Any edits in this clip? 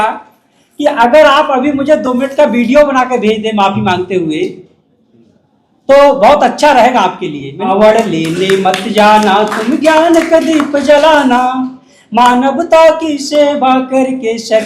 yes; 1 cut; at 7.7 s

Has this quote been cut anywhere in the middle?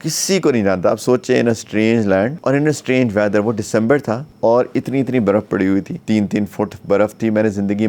yes; 3 cuts; at 2.4 s, 4.3 s, 5.9 s

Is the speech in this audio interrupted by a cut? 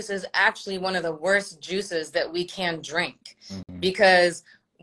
no; 0 cuts

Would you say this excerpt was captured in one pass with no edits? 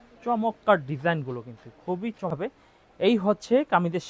no; 1 cut; at 2.3 s

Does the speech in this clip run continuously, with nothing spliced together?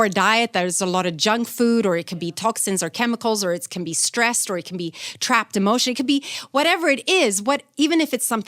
yes; 0 cuts

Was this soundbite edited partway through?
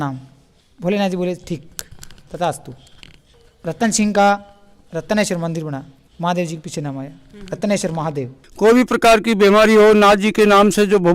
yes; 1 cut; at 8.4 s

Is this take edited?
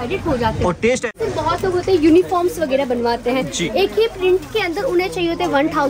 yes; 1 cut; at 1.2 s

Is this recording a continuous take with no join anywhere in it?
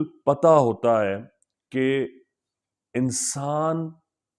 yes; 0 cuts

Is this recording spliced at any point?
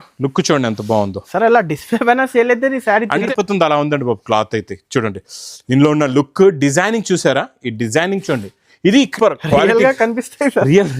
yes; 2 cuts; at 3.3 s, 9.1 s

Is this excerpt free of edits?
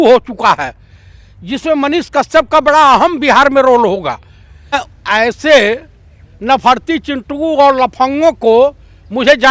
no; 1 cut; at 4.8 s

